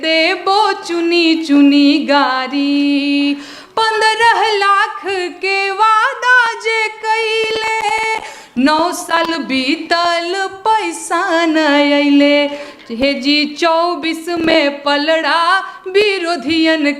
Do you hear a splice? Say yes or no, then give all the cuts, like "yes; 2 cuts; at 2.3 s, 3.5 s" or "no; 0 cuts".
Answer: no; 0 cuts